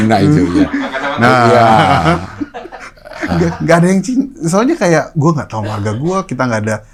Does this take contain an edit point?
no; 0 cuts

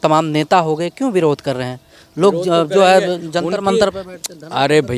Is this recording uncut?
yes; 0 cuts

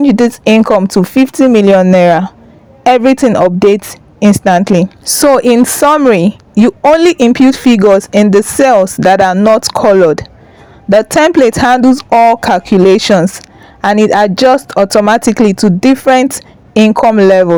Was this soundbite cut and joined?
no; 0 cuts

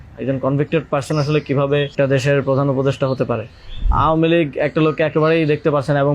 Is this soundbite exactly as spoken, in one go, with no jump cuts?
no; 2 cuts; at 1.9 s, 3.9 s

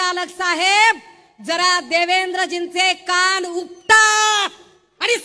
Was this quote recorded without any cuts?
yes; 0 cuts

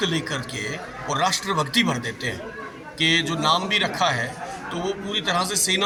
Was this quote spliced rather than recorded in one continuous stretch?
no; 0 cuts

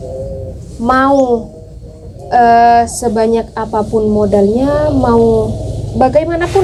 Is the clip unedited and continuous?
yes; 0 cuts

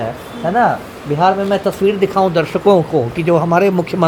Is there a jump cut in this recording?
no; 0 cuts

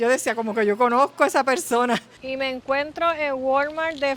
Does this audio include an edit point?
yes; 1 cut; at 2.2 s

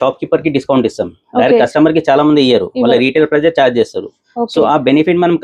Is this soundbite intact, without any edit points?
yes; 0 cuts

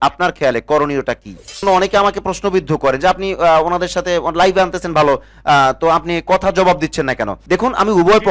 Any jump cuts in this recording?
yes; 2 cuts; at 1.6 s, 7.3 s

